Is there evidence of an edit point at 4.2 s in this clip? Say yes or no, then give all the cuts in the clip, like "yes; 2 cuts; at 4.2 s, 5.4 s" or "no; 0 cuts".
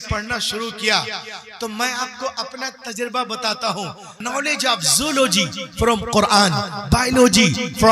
yes; 1 cut; at 4.2 s